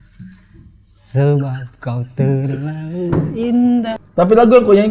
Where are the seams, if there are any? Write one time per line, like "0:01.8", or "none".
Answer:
0:04.0